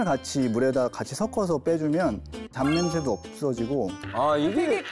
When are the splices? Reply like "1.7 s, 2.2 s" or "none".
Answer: 2.4 s, 4.0 s